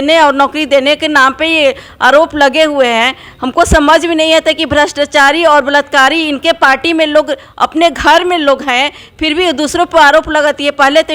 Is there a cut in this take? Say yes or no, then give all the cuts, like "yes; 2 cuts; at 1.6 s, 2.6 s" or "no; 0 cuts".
no; 0 cuts